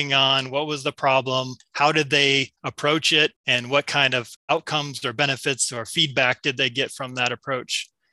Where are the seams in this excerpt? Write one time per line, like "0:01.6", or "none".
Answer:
0:01.6
0:02.6
0:03.4
0:04.3